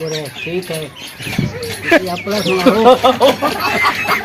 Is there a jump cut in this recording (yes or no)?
yes